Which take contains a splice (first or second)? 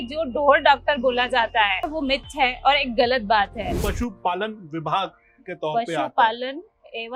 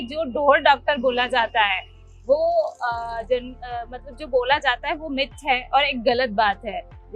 first